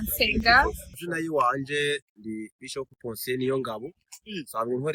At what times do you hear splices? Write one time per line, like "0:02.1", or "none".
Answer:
0:01.0